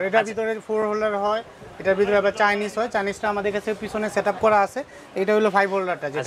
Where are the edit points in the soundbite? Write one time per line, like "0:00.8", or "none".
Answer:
none